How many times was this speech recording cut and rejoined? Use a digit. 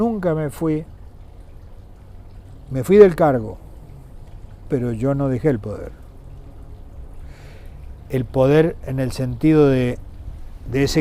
0